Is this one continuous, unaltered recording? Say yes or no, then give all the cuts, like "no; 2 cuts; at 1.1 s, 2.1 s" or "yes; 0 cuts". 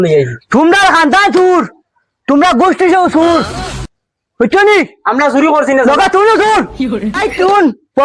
yes; 0 cuts